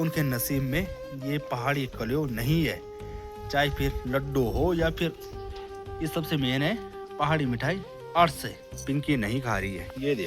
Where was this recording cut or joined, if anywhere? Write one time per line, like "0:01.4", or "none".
0:08.7